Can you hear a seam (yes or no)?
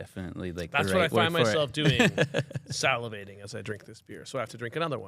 no